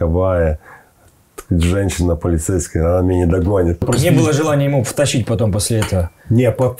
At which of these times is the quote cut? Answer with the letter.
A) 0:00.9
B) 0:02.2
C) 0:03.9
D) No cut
C